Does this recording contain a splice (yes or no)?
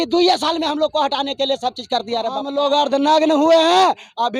yes